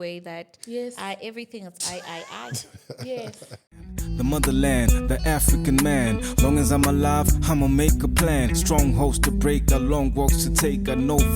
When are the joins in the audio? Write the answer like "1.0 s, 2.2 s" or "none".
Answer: 3.5 s